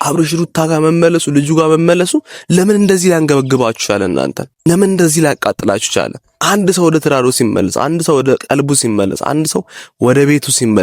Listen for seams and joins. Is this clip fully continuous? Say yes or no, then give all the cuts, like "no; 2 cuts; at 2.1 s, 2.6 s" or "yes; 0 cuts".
no; 2 cuts; at 4.5 s, 6.3 s